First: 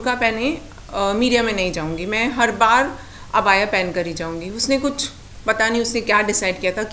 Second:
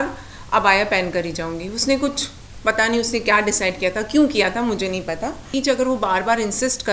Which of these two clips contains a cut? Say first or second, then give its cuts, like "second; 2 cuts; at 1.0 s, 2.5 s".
second; 1 cut; at 5.5 s